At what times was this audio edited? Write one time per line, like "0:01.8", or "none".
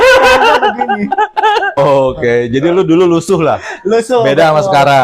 0:01.8